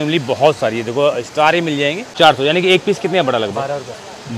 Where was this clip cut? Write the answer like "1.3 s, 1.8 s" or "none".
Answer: 2.0 s